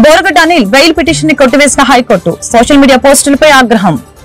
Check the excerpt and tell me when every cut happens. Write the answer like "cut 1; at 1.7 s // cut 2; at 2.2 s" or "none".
none